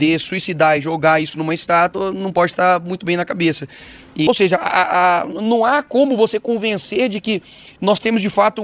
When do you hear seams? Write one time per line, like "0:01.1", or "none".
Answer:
0:04.3